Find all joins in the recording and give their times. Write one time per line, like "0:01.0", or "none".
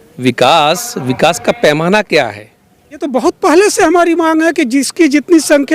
0:03.0